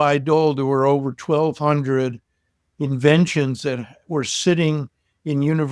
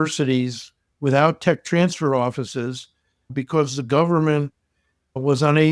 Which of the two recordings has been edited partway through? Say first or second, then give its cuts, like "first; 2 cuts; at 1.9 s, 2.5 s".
second; 1 cut; at 3.2 s